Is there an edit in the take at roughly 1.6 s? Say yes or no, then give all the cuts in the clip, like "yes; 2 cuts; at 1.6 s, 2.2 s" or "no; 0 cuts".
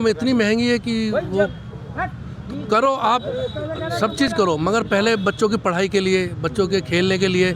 no; 0 cuts